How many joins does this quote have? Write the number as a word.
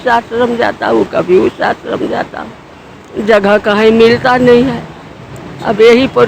zero